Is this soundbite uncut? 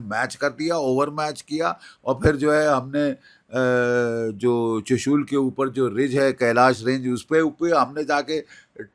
yes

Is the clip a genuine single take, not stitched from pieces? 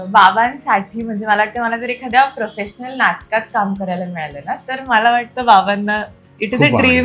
yes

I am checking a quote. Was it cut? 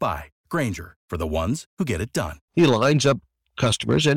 yes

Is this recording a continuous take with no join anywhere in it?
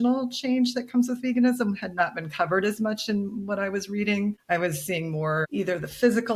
no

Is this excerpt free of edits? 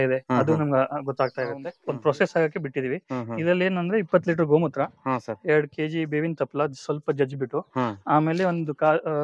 no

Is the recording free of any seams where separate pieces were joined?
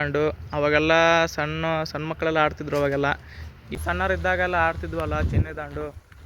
no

